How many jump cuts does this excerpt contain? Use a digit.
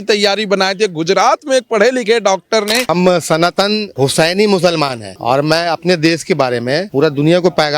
4